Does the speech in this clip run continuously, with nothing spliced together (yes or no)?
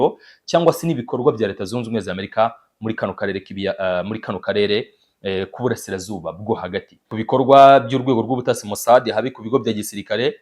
no